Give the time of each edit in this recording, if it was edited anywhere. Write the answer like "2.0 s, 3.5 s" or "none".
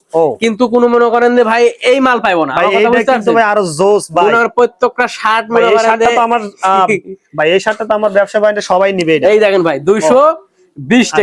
none